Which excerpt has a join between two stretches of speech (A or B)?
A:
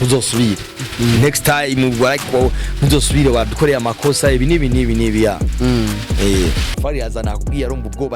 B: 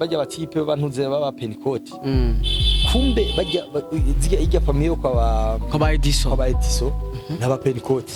A